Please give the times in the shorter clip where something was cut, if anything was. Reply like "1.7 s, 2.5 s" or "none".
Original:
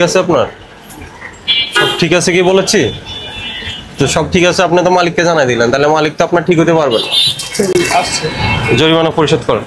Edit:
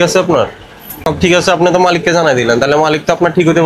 1.0 s